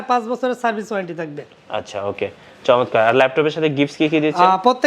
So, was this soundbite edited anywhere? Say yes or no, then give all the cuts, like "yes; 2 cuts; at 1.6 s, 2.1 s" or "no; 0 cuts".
no; 0 cuts